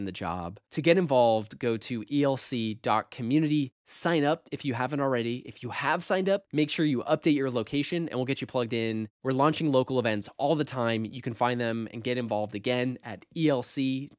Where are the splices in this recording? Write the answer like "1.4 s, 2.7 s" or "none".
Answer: none